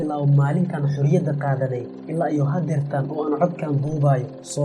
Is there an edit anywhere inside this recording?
no; 0 cuts

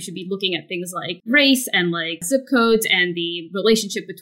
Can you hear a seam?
yes; 2 cuts; at 1.2 s, 2.1 s

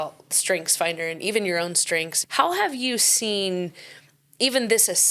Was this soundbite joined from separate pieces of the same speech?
yes; 1 cut; at 2.2 s

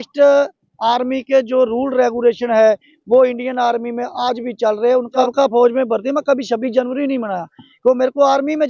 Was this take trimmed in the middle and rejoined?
yes; 1 cut; at 5.3 s

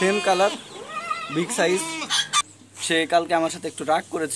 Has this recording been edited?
yes; 1 cut; at 2.4 s

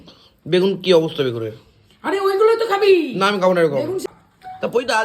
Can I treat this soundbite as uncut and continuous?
no; 1 cut; at 4.1 s

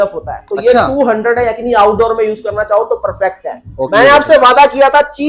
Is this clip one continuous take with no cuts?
no; 1 cut; at 3.9 s

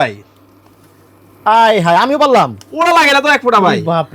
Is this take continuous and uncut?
yes; 0 cuts

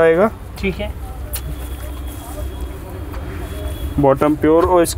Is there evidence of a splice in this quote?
no; 0 cuts

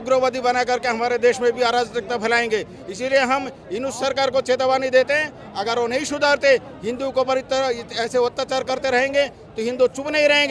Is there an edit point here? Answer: no; 0 cuts

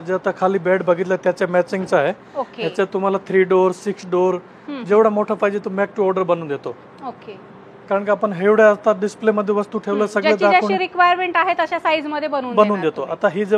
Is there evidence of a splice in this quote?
no; 0 cuts

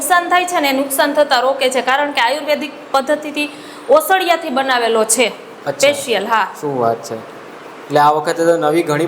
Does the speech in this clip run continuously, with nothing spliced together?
yes; 0 cuts

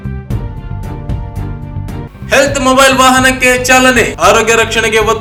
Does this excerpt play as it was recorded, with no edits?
yes; 0 cuts

